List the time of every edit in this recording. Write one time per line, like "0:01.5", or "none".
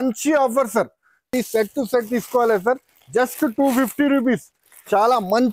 0:01.3